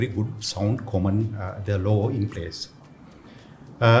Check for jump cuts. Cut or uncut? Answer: uncut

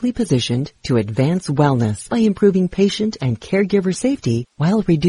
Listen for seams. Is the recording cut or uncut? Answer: cut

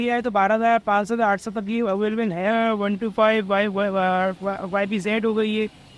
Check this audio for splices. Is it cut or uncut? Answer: cut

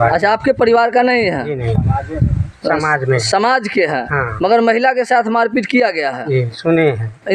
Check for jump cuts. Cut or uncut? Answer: uncut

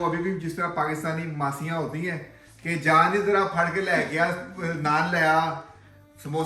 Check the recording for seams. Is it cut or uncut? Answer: uncut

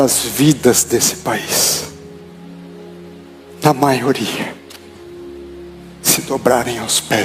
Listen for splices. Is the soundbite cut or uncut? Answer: cut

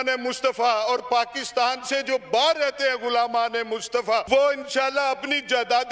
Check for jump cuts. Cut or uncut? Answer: cut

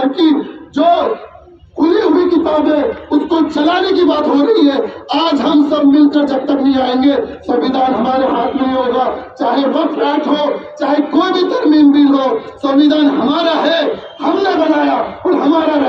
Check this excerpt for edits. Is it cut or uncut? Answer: uncut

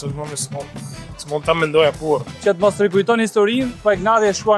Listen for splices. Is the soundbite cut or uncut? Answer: cut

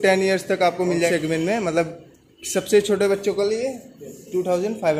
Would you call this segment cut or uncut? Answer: cut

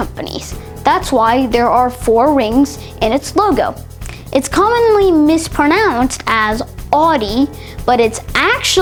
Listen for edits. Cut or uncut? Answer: uncut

